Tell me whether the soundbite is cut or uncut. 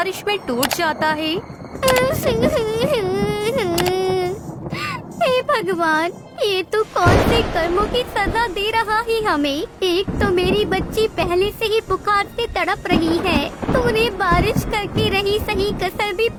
uncut